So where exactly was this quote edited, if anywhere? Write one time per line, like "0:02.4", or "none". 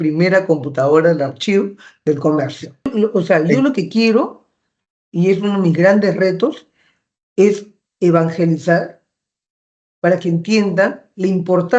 0:02.9